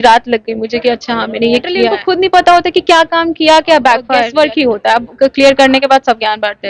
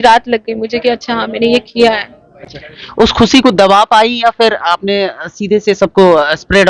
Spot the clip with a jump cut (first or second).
first